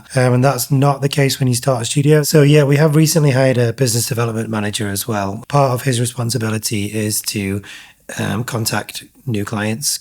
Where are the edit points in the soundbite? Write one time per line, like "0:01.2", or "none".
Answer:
0:02.3
0:05.4